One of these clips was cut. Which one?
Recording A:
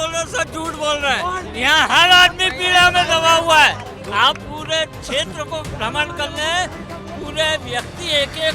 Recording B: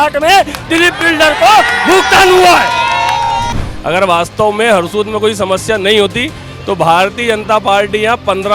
B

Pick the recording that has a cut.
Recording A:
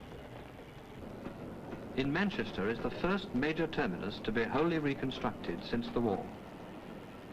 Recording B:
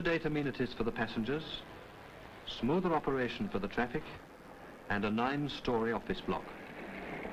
A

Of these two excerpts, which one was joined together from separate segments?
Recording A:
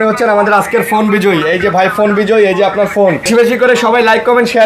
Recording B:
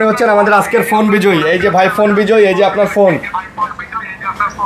A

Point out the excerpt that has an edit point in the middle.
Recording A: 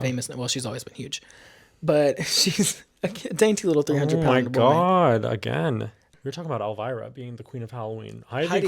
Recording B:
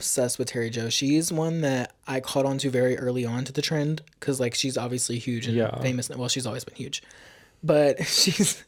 A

